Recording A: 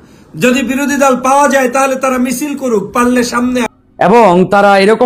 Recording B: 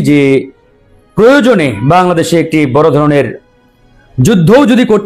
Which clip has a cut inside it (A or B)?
A